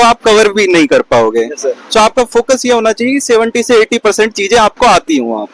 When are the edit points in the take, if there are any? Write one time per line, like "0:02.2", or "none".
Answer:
none

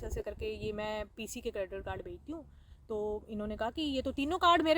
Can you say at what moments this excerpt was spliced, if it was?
none

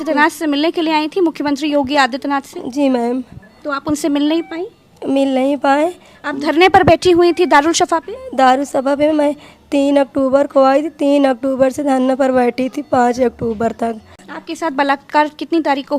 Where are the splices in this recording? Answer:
0:14.3

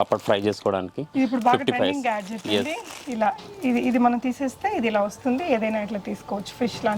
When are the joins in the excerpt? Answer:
none

